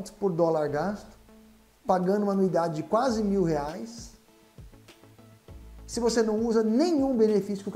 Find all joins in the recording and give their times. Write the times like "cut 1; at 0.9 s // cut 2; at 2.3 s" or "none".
cut 1; at 4.4 s // cut 2; at 5.9 s